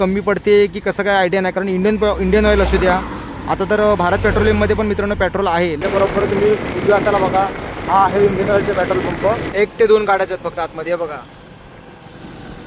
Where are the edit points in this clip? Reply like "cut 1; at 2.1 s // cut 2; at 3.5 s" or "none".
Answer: cut 1; at 5.8 s // cut 2; at 9.5 s